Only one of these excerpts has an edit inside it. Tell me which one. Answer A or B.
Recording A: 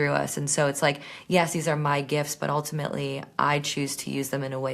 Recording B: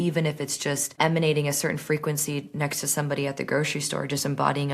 B